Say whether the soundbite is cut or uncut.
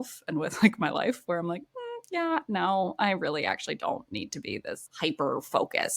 uncut